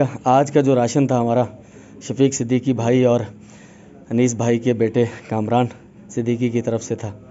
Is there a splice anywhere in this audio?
no; 0 cuts

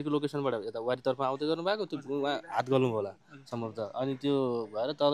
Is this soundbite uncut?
yes; 0 cuts

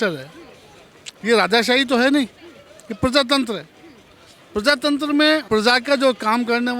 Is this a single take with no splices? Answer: no; 1 cut; at 5.4 s

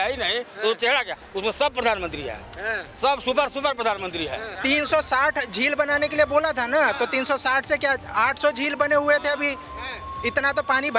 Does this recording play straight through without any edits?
no; 1 cut; at 4.5 s

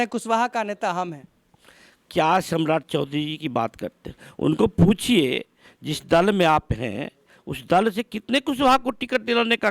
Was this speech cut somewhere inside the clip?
no; 0 cuts

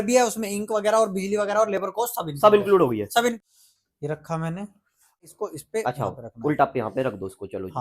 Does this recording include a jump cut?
yes; 2 cuts; at 3.4 s, 5.2 s

